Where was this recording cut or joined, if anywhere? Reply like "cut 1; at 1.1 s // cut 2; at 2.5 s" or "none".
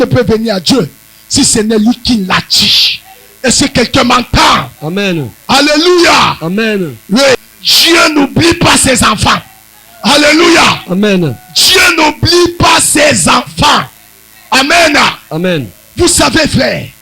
cut 1; at 7.4 s